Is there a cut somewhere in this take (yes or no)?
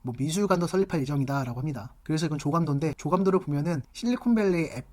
no